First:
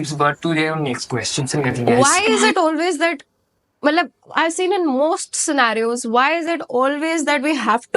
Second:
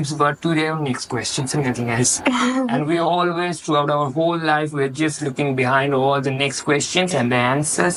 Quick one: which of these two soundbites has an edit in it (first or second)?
first